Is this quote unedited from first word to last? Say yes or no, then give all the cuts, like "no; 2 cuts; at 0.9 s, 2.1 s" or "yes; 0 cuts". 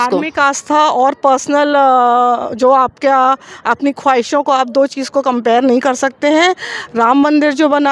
yes; 0 cuts